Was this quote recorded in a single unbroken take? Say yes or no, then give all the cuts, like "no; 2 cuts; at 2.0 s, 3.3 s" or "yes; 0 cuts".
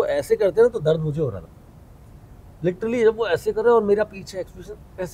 yes; 0 cuts